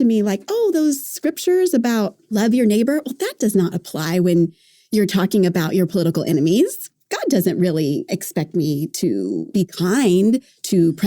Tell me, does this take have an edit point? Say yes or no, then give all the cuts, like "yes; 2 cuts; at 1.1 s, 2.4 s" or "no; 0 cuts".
yes; 4 cuts; at 2.3 s, 4.8 s, 6.8 s, 9.5 s